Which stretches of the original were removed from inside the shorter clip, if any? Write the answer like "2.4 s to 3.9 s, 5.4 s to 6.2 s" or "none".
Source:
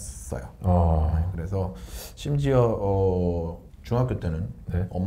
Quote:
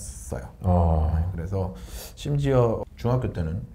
2.8 s to 3.7 s